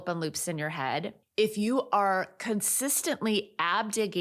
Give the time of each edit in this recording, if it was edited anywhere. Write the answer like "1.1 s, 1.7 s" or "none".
1.2 s